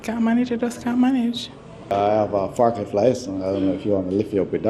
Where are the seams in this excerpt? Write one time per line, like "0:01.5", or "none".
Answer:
0:01.9